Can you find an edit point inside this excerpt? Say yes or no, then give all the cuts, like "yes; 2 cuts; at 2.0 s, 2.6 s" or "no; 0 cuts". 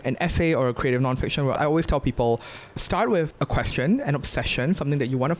yes; 2 cuts; at 1.5 s, 2.9 s